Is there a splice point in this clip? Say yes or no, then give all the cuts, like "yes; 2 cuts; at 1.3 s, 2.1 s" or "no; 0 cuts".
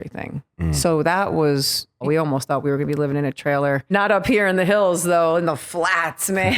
yes; 2 cuts; at 2.0 s, 3.9 s